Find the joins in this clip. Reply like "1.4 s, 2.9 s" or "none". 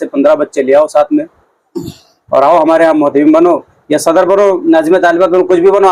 none